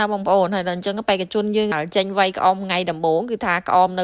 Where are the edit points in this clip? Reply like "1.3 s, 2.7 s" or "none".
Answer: 1.7 s